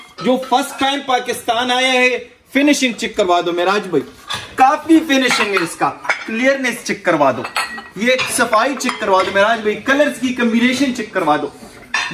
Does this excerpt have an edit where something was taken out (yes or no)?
no